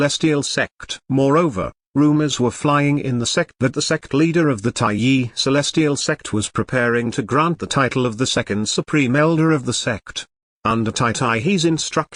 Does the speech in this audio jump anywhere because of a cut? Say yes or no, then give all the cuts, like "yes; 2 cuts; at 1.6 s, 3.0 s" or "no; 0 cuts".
no; 0 cuts